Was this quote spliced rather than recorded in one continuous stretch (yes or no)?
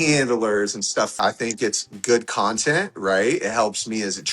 yes